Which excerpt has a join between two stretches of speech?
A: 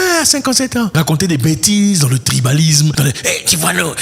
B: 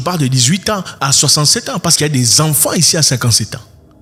A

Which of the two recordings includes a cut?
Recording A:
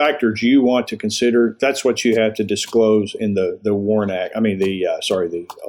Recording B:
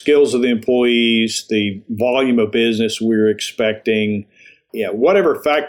B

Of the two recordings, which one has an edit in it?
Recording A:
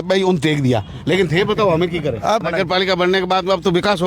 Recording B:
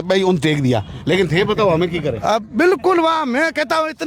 A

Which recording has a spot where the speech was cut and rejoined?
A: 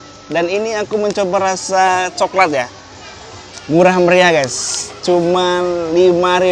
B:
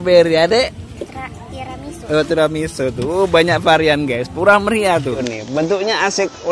B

